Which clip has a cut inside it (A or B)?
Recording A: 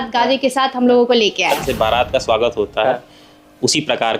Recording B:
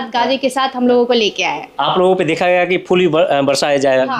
A